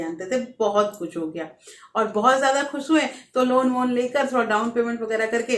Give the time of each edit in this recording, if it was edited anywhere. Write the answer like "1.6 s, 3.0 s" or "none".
none